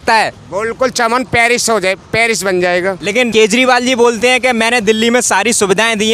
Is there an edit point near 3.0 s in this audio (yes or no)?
no